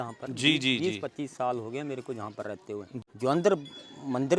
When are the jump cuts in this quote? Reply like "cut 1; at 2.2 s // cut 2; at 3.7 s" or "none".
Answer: cut 1; at 3.0 s